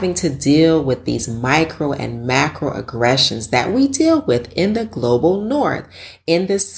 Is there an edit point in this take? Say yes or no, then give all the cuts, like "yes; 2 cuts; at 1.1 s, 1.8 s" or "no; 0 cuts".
no; 0 cuts